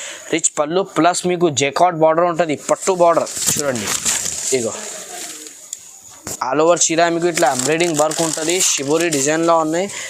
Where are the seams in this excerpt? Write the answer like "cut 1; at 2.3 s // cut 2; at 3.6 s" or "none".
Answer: none